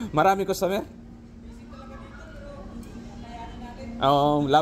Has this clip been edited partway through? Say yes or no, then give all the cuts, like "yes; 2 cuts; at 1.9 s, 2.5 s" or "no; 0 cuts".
no; 0 cuts